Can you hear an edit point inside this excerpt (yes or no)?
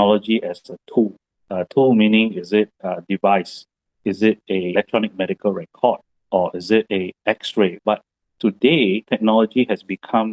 yes